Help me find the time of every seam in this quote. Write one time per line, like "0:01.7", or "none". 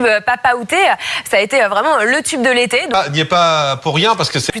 0:02.7